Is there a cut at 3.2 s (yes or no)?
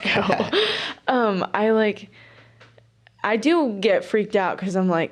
no